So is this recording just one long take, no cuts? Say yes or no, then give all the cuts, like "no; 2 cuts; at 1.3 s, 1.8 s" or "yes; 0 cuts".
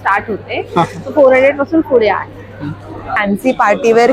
no; 1 cut; at 3.2 s